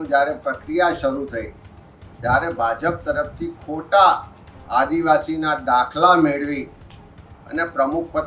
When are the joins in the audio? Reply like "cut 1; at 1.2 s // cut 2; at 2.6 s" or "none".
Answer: none